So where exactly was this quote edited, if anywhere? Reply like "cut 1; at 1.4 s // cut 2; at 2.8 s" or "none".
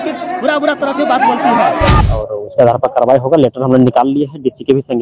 cut 1; at 2.0 s

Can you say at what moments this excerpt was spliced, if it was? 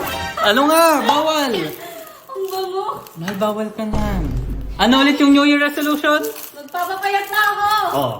cut 1; at 4.5 s

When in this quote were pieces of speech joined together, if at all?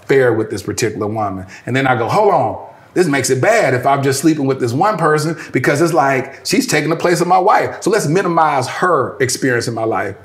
none

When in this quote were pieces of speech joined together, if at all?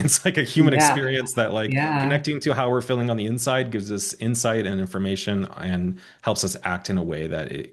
none

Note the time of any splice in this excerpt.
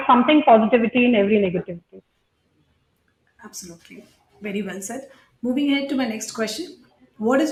none

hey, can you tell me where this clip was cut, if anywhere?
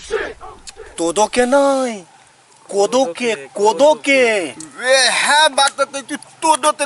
cut 1; at 1.0 s

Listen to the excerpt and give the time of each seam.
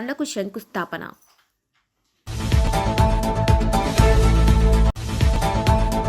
cut 1; at 5.0 s

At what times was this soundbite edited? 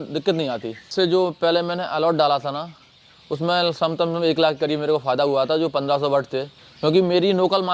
cut 1; at 0.9 s

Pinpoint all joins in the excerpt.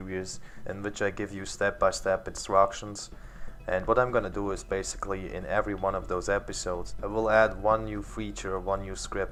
none

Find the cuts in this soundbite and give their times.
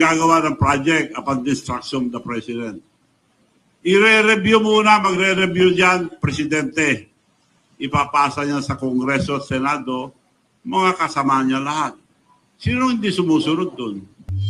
none

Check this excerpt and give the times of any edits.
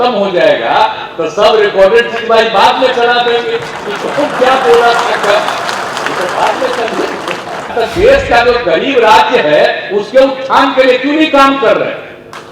cut 1; at 7.7 s

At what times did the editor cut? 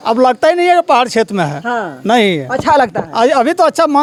none

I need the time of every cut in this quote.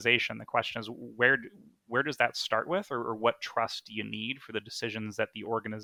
none

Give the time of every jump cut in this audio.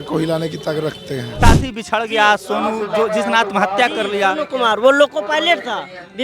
cut 1; at 1.4 s

